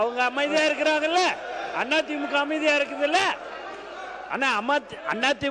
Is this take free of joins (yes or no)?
yes